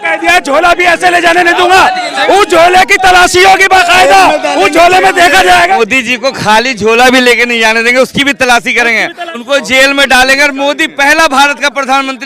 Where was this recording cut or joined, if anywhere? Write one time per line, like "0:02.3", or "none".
0:05.8
0:09.3

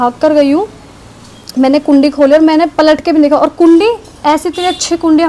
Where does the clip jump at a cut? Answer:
none

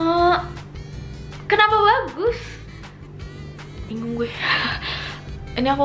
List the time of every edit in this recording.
none

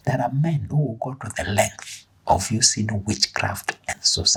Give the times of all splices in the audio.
none

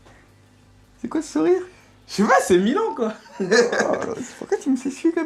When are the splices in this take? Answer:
none

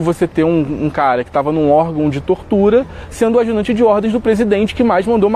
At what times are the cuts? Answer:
none

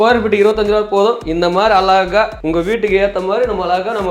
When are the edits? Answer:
none

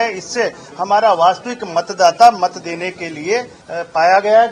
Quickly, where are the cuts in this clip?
0:03.6

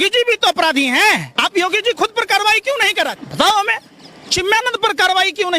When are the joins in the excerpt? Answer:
0:01.3
0:03.2

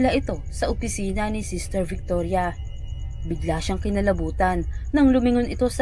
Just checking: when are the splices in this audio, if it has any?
none

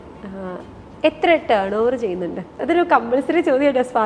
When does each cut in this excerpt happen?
0:02.6

